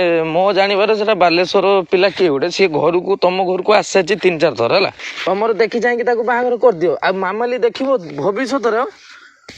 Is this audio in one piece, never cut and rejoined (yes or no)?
no